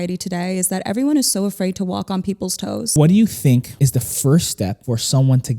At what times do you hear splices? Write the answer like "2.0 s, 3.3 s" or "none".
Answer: 2.9 s, 3.7 s, 4.8 s